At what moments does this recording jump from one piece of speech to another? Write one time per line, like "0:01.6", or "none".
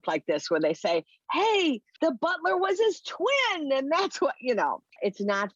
0:01.9